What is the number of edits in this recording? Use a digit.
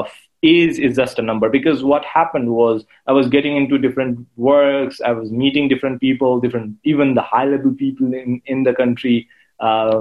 0